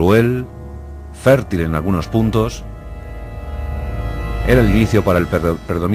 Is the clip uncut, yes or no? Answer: no